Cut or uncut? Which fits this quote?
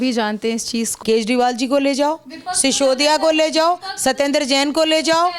cut